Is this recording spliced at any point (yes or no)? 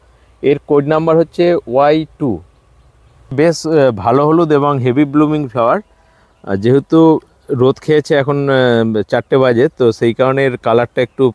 yes